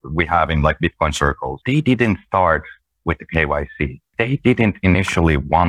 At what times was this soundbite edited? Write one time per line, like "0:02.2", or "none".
0:01.5
0:04.1